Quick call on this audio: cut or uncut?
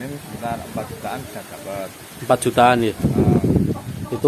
uncut